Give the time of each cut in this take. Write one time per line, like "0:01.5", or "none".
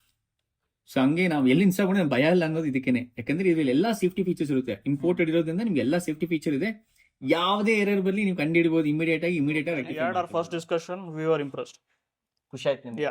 0:09.9